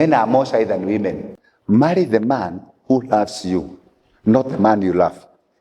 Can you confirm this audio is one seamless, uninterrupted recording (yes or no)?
no